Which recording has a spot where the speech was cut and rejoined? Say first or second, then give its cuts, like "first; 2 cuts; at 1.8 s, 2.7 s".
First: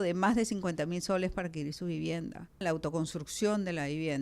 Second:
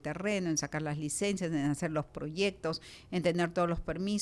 first; 1 cut; at 2.6 s